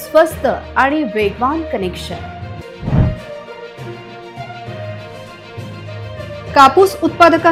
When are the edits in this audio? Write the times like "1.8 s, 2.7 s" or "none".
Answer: none